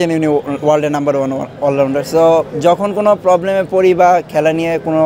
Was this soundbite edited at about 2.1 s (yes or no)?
no